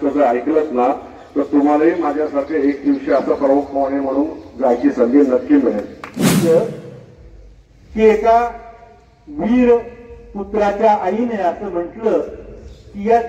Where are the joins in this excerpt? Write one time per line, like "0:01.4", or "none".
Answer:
0:06.4